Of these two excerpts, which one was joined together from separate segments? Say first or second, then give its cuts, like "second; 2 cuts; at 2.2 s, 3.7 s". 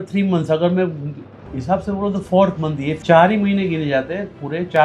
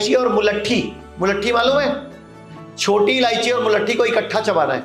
first; 1 cut; at 3.0 s